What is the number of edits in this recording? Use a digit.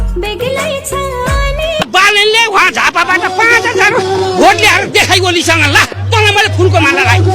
1